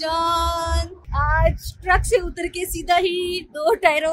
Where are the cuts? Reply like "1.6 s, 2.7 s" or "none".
1.0 s